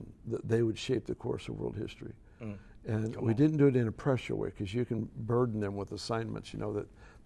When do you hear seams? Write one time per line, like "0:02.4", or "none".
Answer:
none

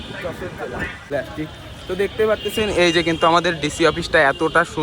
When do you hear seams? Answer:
0:01.1

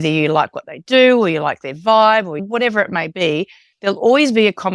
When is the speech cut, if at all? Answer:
0:02.4

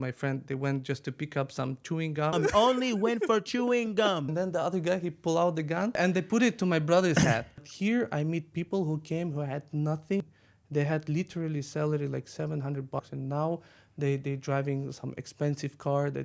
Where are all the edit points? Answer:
0:02.3
0:04.3
0:06.0
0:07.7
0:10.2
0:13.0

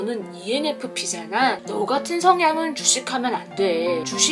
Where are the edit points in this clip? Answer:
0:01.6

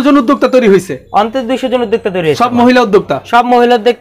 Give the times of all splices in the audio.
none

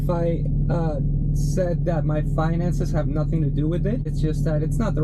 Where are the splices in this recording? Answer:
0:04.1

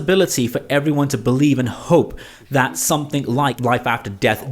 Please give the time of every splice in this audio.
0:03.6

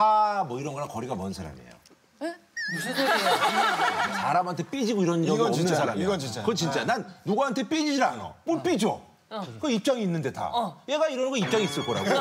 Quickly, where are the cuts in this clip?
0:04.1

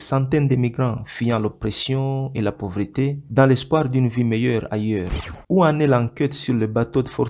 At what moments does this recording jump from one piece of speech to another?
0:05.2

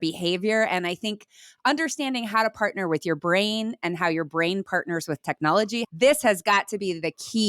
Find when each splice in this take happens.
0:05.8

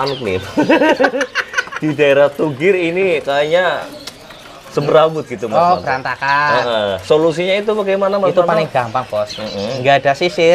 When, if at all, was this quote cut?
none

